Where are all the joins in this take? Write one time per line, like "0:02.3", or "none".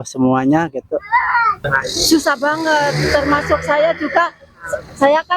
none